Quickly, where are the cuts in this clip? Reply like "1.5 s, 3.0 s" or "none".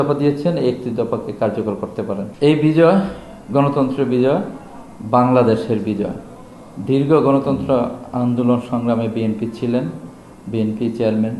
2.3 s

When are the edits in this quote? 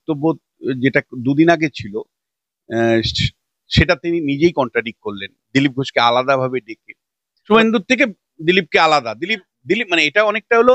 7.5 s

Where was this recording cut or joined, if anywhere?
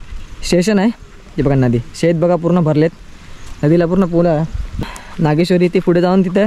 4.8 s

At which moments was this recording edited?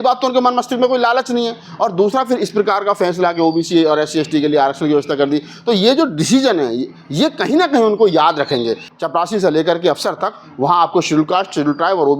8.8 s

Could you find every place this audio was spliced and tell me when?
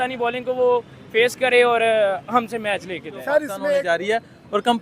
3.6 s

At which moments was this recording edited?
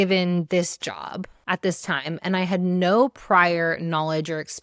1.3 s

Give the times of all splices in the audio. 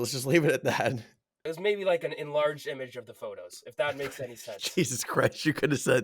1.5 s

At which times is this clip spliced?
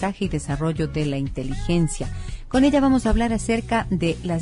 2.0 s

